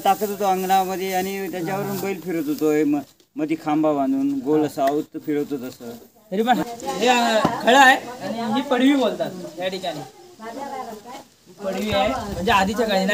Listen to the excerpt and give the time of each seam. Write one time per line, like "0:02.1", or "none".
0:06.6